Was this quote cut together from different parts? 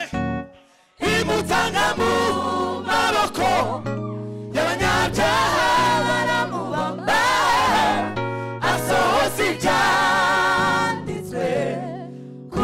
no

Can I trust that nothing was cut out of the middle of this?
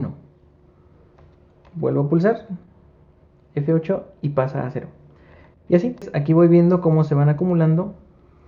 no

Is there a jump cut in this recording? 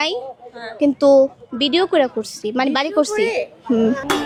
no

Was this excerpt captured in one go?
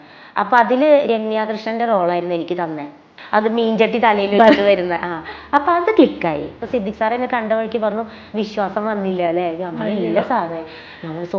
no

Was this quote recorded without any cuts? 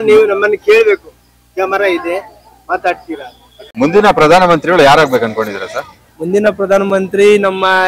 no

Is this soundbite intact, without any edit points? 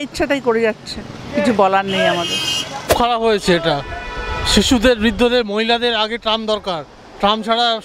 yes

